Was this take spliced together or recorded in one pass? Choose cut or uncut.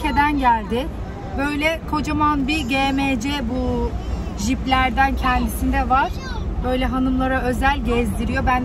uncut